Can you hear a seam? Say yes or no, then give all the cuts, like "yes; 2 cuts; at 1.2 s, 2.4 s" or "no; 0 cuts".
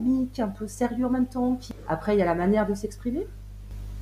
yes; 1 cut; at 1.7 s